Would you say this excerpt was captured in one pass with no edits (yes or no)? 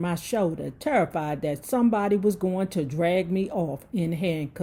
yes